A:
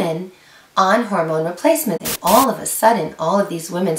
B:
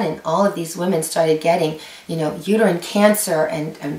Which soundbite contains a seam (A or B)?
A